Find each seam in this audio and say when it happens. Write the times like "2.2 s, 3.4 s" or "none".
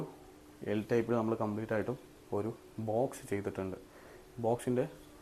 none